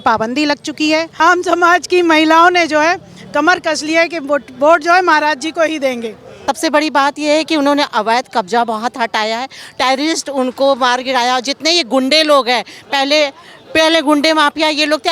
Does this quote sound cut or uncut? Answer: cut